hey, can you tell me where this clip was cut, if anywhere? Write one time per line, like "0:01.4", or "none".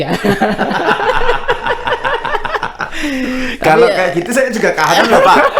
none